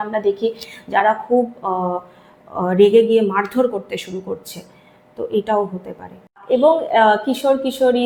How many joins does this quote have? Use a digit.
0